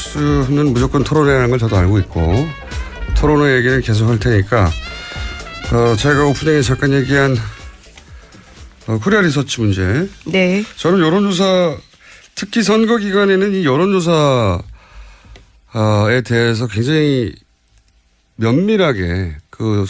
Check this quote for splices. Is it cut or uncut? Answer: uncut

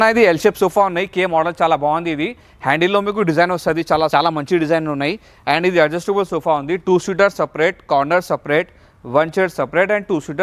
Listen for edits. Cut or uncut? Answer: uncut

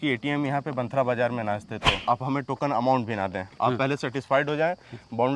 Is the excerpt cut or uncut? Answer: cut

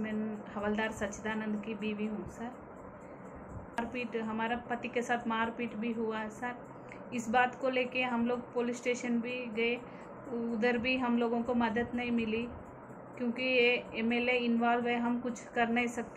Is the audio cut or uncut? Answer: cut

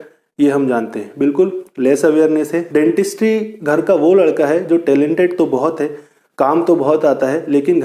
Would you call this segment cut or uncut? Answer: cut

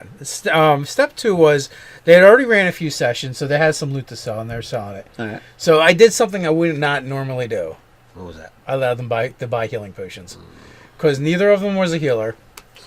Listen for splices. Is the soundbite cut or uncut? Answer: cut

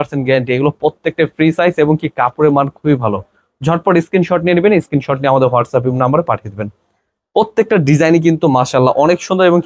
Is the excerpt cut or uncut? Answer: uncut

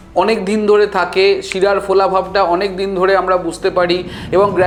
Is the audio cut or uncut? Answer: uncut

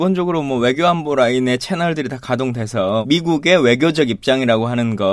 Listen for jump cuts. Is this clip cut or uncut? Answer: cut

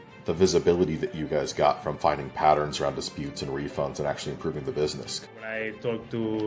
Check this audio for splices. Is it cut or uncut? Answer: cut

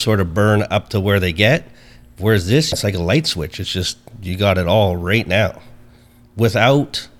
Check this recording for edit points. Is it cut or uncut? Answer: cut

